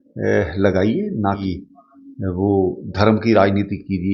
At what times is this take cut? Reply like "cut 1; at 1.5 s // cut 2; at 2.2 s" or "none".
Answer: cut 1; at 1.5 s